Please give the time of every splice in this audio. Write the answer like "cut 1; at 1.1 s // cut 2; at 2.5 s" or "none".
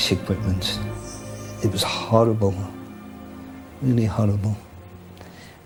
none